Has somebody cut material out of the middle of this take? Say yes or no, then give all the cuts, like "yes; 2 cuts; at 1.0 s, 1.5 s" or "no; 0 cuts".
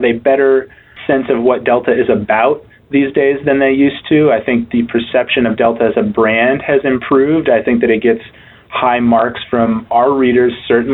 no; 0 cuts